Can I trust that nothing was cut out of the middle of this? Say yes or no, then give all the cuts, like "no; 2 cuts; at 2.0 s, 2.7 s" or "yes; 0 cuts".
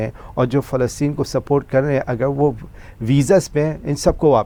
yes; 0 cuts